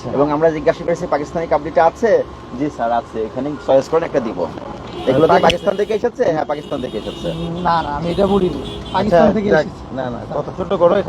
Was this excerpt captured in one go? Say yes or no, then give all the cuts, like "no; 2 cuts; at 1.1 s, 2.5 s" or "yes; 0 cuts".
yes; 0 cuts